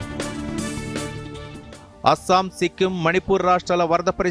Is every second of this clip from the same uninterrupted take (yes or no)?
no